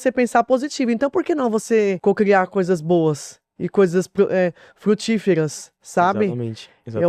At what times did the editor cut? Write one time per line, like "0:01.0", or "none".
0:02.0